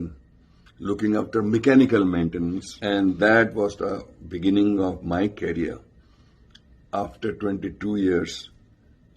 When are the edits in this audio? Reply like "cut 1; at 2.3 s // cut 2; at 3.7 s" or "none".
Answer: cut 1; at 2.7 s

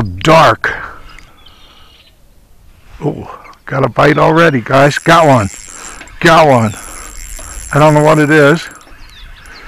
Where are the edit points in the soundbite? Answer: cut 1; at 1.5 s

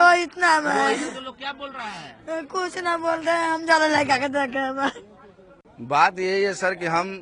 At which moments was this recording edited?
cut 1; at 5.5 s

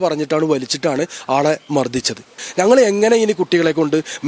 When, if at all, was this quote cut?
cut 1; at 2.3 s

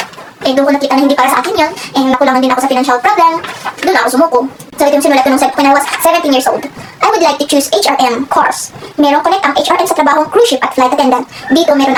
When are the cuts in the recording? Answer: none

